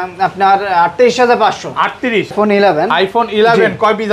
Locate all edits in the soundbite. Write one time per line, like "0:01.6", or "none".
0:02.3